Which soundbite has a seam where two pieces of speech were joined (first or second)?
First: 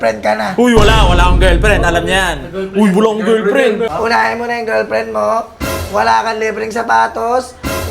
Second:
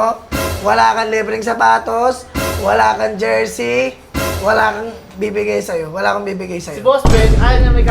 first